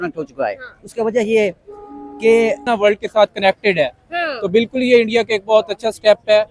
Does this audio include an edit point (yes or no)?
yes